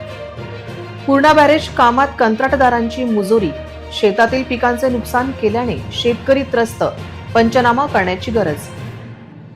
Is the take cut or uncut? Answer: cut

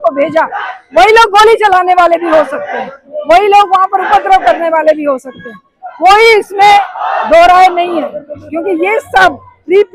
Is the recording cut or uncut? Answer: uncut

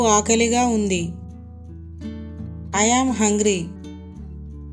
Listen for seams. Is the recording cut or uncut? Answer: cut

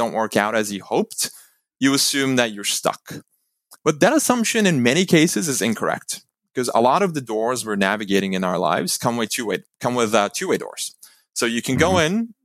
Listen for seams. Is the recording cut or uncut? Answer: uncut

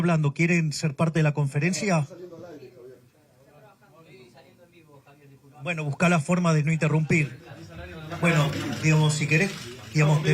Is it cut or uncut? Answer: uncut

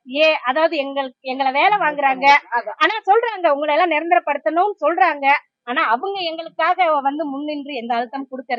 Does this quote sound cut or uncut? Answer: uncut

